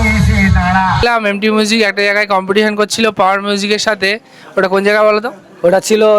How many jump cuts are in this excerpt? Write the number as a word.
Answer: one